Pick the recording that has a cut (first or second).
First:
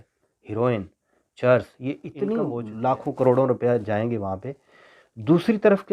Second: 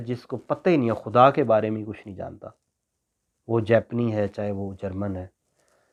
first